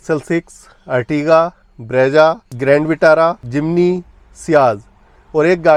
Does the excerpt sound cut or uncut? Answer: uncut